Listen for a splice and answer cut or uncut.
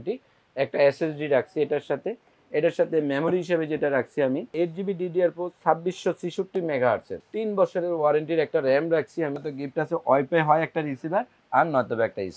cut